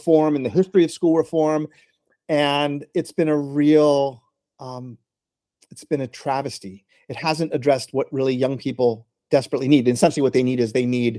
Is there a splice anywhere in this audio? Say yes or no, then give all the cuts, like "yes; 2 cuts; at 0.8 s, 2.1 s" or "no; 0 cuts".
no; 0 cuts